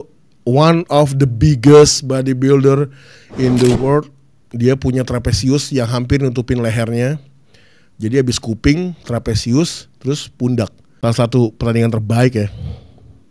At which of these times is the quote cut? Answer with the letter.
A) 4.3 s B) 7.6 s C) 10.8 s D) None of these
C